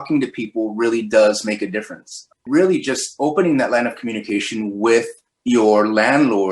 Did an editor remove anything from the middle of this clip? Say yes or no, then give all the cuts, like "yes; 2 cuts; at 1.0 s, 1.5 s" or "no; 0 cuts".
yes; 1 cut; at 2.4 s